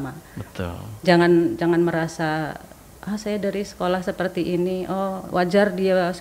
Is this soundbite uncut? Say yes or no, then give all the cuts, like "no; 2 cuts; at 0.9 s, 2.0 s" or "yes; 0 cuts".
yes; 0 cuts